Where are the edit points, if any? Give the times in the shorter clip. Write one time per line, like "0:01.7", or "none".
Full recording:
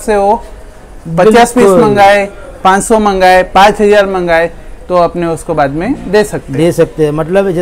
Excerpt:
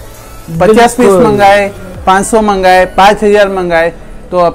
none